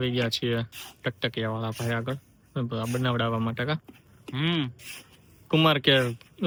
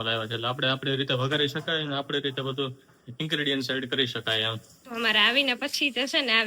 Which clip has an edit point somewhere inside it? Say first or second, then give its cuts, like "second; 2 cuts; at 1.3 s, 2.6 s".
second; 1 cut; at 4.7 s